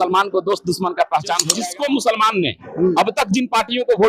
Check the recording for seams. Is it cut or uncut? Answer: cut